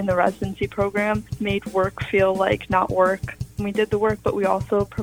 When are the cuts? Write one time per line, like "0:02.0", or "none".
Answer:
0:03.6